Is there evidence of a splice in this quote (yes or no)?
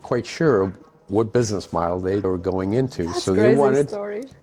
no